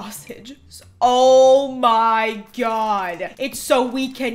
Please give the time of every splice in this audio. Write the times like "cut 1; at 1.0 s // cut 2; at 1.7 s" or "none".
none